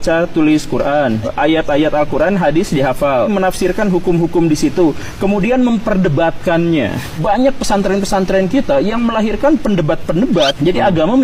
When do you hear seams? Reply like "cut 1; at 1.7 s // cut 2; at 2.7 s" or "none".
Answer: none